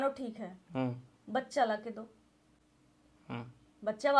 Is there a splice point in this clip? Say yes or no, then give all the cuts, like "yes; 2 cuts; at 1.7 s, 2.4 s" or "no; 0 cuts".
no; 0 cuts